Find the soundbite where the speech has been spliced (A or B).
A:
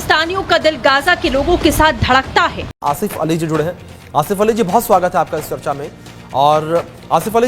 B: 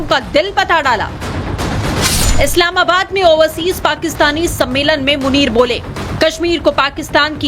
A